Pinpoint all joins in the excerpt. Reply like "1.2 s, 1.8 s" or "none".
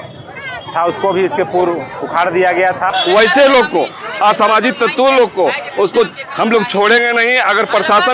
2.9 s